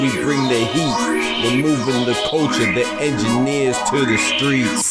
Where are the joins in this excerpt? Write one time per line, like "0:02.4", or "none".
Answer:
none